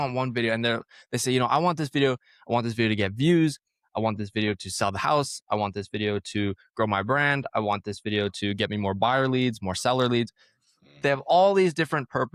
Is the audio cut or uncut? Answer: uncut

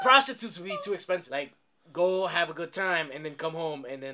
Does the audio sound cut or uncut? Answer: cut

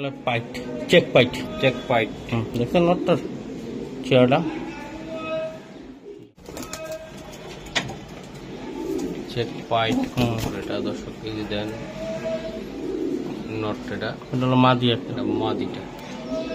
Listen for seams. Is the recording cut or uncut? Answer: cut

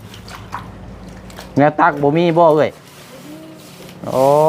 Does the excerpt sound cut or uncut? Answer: uncut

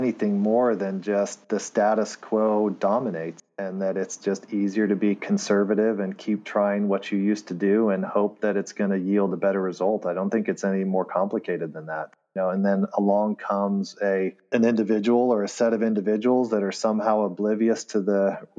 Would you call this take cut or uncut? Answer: uncut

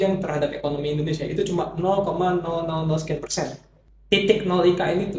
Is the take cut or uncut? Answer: cut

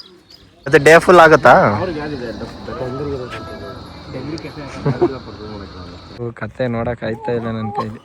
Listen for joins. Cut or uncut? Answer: cut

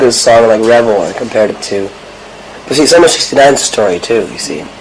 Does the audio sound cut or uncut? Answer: uncut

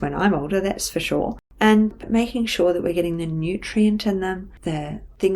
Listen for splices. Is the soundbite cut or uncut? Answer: cut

